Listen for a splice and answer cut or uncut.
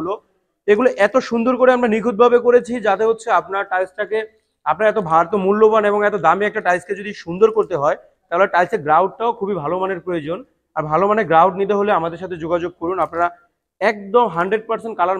uncut